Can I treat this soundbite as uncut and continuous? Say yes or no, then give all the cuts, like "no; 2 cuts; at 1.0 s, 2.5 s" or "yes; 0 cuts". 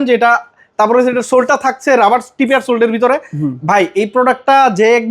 yes; 0 cuts